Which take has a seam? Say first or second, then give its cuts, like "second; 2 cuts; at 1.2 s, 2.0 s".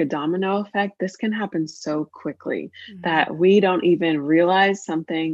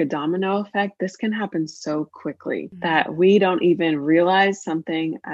second; 1 cut; at 2.7 s